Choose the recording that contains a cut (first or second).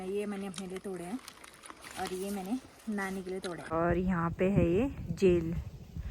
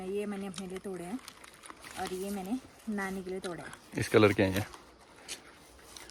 first